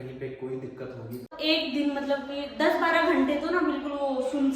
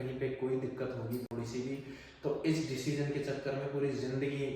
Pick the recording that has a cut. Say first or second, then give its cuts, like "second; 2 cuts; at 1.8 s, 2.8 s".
first; 1 cut; at 1.3 s